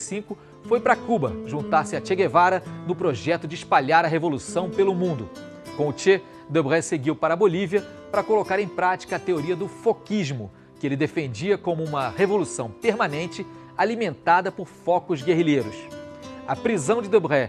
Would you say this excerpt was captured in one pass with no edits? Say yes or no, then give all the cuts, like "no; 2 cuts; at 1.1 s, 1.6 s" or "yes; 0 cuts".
no; 1 cut; at 13.1 s